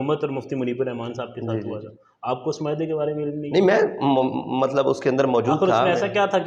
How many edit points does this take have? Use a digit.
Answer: 0